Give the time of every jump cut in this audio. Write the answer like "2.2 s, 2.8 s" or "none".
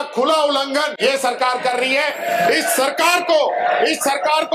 0.9 s